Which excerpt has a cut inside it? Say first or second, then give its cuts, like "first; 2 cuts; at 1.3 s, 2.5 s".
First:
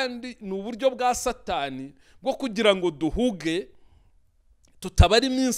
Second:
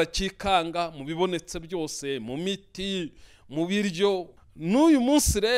second; 1 cut; at 4.4 s